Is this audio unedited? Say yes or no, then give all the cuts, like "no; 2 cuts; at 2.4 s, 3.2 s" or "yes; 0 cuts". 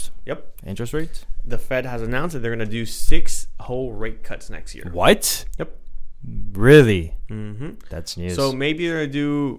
yes; 0 cuts